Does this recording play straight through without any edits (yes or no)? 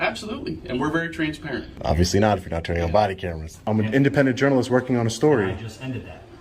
no